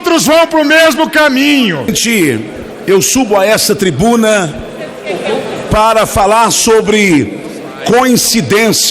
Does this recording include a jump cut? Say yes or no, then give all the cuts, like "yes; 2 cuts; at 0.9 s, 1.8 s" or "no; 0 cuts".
yes; 1 cut; at 1.9 s